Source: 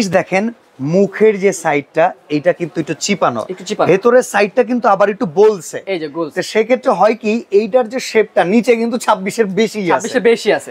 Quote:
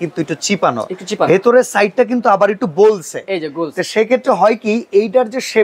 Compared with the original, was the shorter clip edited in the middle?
no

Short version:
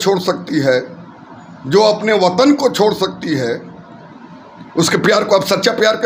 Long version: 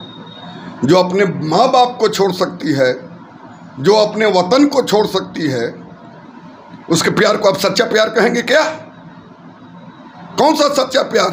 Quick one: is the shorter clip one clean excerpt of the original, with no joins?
yes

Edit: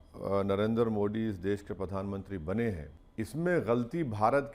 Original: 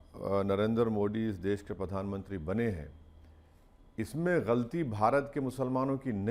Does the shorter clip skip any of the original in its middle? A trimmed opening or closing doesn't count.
yes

